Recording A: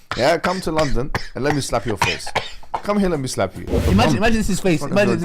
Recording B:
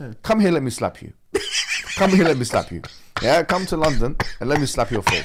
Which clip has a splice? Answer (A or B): A